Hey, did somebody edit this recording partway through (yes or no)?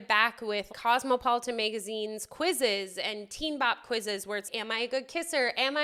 no